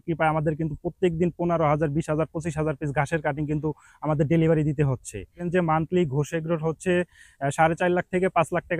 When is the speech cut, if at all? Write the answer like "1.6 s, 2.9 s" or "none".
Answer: 5.4 s